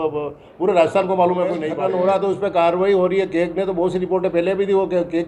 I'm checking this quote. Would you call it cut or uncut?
cut